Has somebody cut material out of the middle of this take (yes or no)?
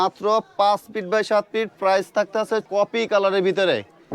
yes